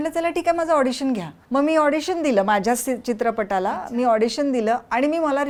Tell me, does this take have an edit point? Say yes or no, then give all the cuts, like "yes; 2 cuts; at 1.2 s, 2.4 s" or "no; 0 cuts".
no; 0 cuts